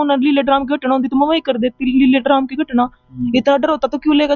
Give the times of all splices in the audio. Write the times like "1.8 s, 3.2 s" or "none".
none